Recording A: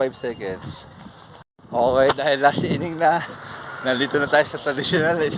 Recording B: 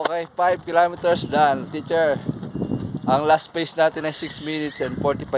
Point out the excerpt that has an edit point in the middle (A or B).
A